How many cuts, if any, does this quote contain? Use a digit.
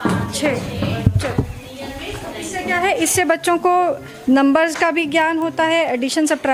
0